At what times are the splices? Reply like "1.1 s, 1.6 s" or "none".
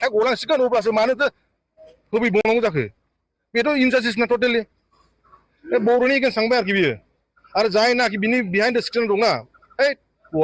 none